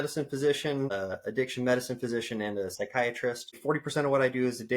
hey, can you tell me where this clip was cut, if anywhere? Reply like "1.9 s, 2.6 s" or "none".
0.9 s, 3.6 s